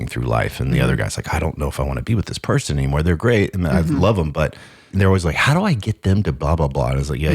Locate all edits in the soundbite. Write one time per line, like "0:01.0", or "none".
0:04.9